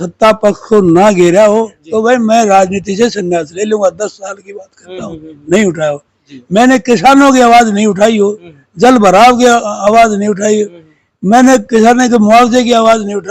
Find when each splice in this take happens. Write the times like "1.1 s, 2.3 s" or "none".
1.8 s

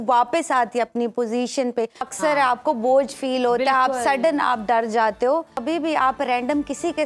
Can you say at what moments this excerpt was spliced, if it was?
2.0 s, 5.6 s

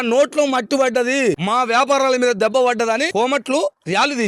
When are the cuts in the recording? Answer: 1.4 s, 3.1 s

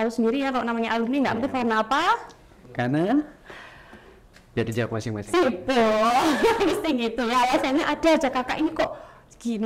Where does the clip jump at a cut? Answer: none

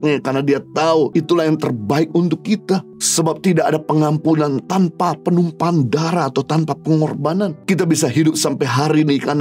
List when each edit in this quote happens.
1.1 s, 3.0 s, 7.6 s

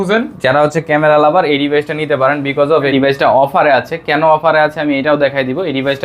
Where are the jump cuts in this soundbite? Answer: 2.9 s

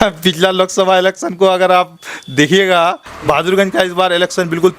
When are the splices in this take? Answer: 3.1 s

